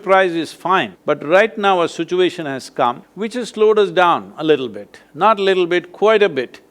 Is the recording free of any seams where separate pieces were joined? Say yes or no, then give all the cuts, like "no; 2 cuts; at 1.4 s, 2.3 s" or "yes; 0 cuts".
no; 2 cuts; at 0.9 s, 3.1 s